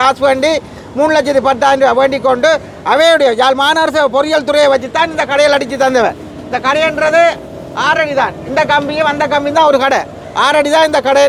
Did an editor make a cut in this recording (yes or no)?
no